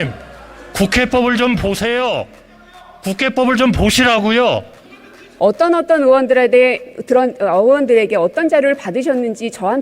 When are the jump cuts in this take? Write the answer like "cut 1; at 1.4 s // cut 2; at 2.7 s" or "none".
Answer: cut 1; at 5.2 s